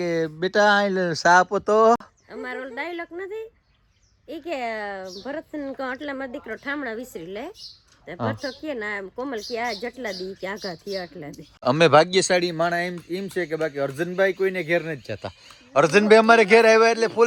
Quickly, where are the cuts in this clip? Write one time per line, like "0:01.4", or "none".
none